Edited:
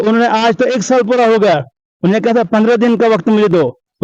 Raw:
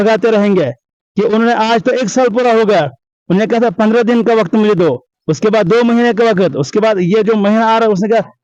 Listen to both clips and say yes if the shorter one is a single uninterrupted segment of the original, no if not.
yes